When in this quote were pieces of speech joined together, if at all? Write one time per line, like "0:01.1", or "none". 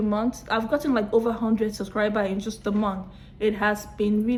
none